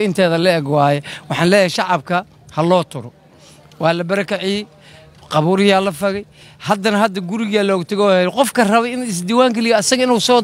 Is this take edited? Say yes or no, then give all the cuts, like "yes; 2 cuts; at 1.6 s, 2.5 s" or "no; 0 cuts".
no; 0 cuts